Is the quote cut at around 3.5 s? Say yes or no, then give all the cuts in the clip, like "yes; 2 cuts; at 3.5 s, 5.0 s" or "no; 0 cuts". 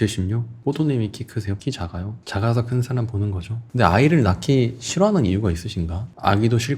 yes; 1 cut; at 3.5 s